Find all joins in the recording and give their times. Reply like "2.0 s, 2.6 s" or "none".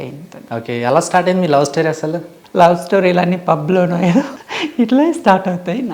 2.3 s, 4.4 s